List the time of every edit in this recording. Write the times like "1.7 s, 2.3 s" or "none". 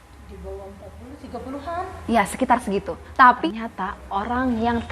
3.4 s